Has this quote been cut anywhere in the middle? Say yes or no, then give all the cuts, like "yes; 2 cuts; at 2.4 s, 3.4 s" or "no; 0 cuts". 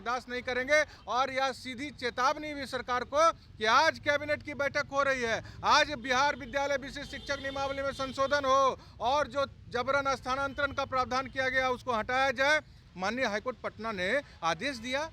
yes; 2 cuts; at 0.9 s, 12.8 s